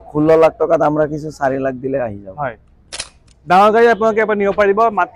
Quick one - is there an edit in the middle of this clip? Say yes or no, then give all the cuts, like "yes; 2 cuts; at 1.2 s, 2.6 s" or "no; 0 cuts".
no; 0 cuts